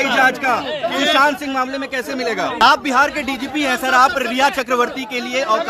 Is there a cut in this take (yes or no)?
yes